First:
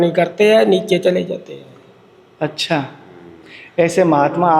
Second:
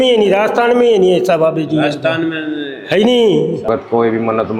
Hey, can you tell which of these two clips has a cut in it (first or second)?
second